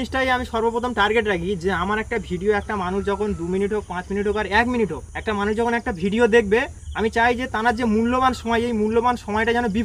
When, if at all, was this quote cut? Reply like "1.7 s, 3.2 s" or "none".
5.1 s, 6.8 s